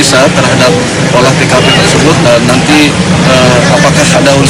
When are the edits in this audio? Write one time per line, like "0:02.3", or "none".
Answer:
0:02.7